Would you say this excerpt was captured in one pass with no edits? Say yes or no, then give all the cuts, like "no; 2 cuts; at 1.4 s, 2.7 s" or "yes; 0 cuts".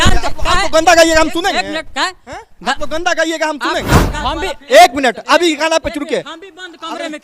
no; 1 cut; at 4.1 s